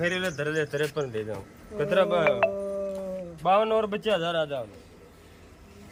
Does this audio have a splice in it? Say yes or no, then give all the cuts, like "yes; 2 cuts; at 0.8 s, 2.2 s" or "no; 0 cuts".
no; 0 cuts